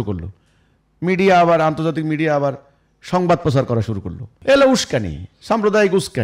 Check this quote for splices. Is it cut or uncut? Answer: cut